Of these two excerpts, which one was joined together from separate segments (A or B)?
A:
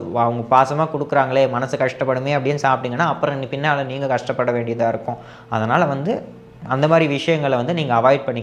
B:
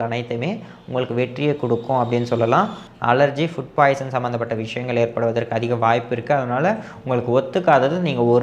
B